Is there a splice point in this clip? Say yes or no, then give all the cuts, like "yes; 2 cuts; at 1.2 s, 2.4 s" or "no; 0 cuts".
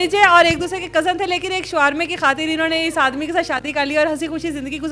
no; 0 cuts